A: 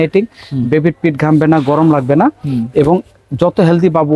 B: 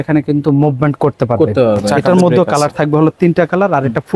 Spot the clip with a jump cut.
B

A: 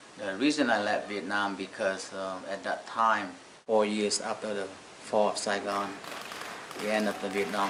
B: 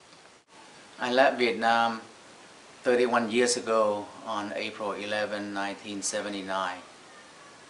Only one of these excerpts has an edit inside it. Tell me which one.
B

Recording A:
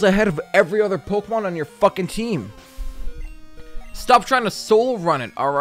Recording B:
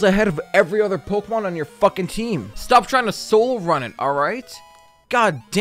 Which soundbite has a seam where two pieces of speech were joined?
B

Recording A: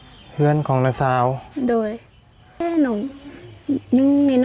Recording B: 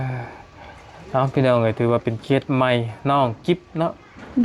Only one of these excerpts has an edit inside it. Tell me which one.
A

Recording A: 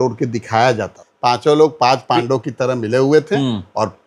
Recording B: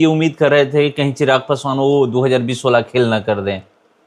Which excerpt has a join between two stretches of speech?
A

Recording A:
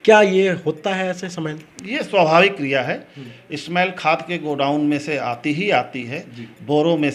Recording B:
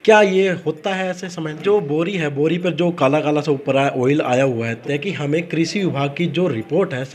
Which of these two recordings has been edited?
B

